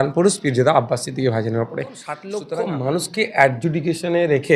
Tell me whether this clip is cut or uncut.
cut